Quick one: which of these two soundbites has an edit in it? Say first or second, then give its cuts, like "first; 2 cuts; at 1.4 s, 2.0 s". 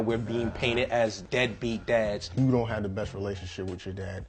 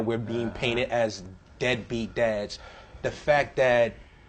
first; 1 cut; at 1.2 s